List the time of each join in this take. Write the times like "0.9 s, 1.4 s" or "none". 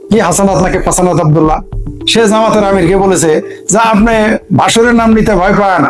none